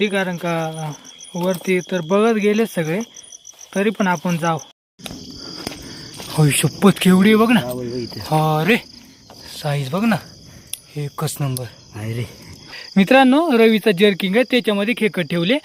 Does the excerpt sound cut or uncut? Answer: cut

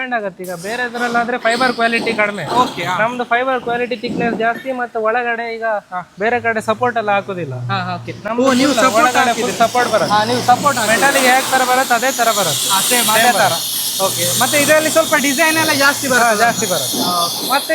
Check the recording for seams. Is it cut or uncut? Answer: uncut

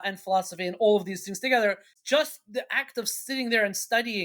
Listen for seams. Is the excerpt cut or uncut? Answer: cut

